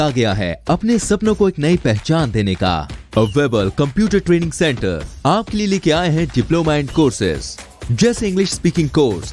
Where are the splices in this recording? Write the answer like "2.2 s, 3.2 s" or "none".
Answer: none